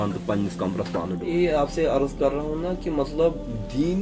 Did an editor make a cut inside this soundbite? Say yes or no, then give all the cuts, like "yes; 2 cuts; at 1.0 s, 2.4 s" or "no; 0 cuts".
yes; 1 cut; at 1.2 s